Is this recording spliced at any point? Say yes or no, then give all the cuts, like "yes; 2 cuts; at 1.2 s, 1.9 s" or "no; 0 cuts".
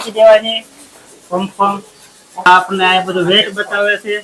yes; 1 cut; at 2.5 s